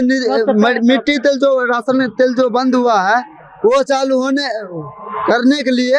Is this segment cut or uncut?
uncut